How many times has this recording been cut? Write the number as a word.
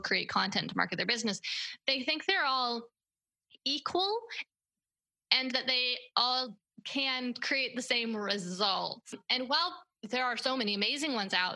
one